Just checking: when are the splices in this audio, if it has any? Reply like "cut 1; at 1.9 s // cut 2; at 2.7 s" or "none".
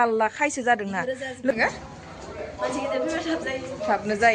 cut 1; at 1.5 s